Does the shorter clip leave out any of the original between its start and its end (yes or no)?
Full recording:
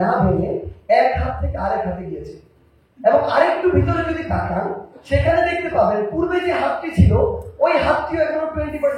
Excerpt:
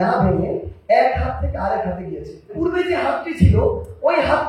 yes